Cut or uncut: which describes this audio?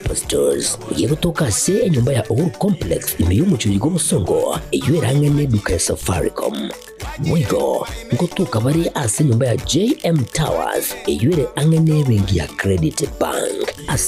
uncut